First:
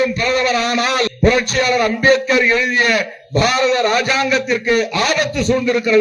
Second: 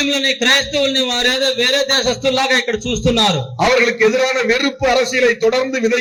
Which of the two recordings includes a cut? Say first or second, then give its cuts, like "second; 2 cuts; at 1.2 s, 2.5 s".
first; 1 cut; at 1.1 s